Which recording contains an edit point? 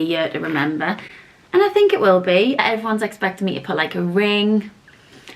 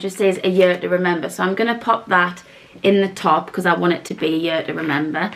first; 1 cut; at 2.6 s

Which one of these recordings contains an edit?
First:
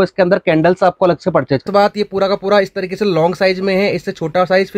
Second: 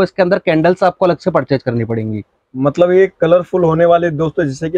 first; 1 cut; at 1.7 s

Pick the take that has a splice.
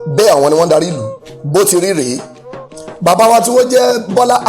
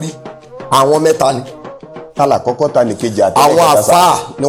first; 1 cut; at 1.4 s

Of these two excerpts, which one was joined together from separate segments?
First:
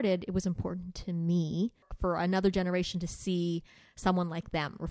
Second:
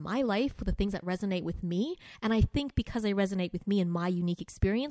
first; 1 cut; at 1.9 s

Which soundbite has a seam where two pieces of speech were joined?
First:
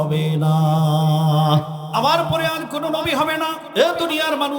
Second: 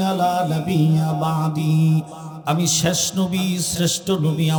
first; 2 cuts; at 1.8 s, 3.6 s

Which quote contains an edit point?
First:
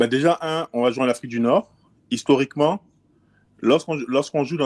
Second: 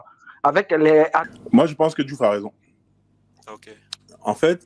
second; 1 cut; at 1.3 s

